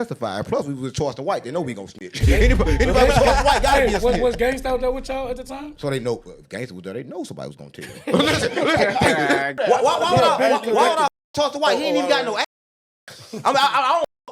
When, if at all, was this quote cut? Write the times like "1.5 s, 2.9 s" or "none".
9.5 s